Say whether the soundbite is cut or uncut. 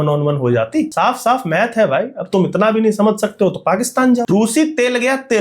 cut